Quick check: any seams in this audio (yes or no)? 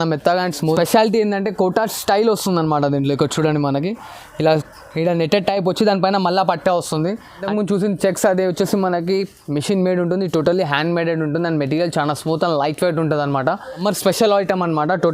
yes